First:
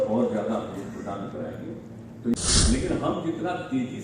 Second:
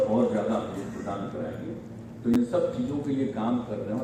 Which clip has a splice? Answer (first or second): first